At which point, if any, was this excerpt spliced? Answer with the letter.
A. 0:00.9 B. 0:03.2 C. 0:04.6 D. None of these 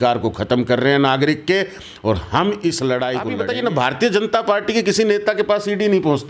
B